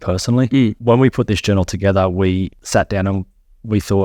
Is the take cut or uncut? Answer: cut